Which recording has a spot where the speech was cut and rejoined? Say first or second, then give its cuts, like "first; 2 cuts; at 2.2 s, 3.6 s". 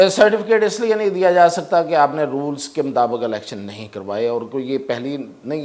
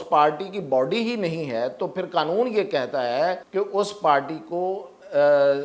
second; 1 cut; at 3.4 s